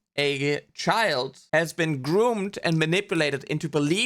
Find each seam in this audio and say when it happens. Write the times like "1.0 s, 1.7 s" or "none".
1.4 s